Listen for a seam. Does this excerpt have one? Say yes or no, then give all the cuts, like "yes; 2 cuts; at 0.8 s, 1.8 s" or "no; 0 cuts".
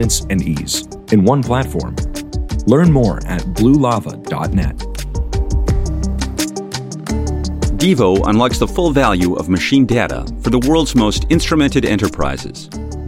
yes; 2 cuts; at 5.2 s, 7.8 s